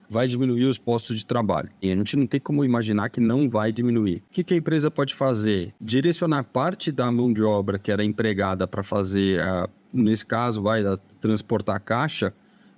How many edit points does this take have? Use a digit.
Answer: 3